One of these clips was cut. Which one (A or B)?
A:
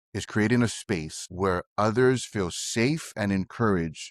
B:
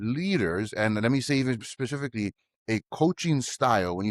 A